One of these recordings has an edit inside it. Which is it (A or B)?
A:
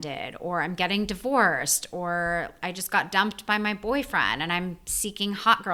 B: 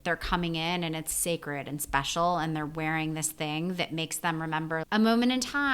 B